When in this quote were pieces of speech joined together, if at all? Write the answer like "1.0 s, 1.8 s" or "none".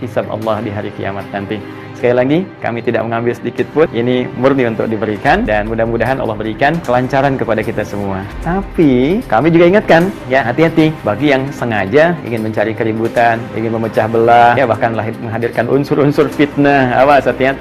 none